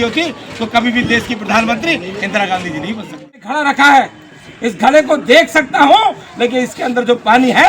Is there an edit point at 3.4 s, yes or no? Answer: yes